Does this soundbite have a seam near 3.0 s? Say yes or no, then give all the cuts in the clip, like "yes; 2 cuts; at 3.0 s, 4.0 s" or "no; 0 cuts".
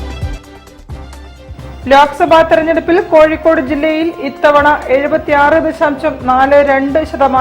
no; 1 cut; at 1.4 s